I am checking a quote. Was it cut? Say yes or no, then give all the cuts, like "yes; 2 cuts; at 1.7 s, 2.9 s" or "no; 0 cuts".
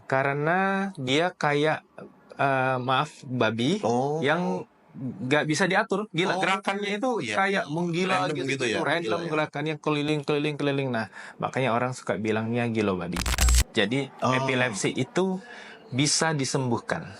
yes; 1 cut; at 13.4 s